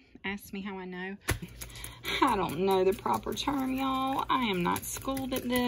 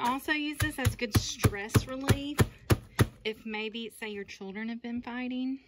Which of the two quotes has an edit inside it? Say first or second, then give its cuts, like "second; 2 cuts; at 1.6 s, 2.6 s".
first; 1 cut; at 1.5 s